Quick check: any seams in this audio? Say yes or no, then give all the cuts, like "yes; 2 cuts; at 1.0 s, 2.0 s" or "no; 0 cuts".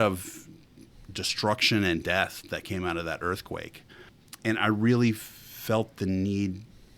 yes; 1 cut; at 4.1 s